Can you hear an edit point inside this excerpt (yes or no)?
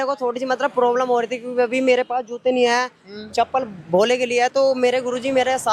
no